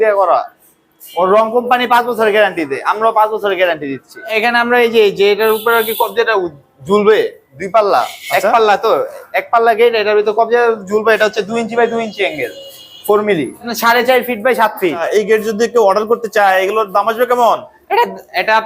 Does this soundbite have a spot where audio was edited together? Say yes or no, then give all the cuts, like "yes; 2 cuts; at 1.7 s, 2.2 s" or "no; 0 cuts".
yes; 3 cuts; at 4.3 s, 13.7 s, 15.0 s